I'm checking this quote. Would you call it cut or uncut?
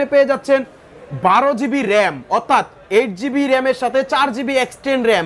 uncut